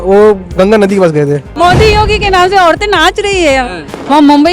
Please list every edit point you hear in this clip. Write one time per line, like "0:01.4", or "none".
0:01.5